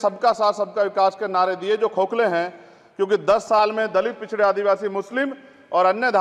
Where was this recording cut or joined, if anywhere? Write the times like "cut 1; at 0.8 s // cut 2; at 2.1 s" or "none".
none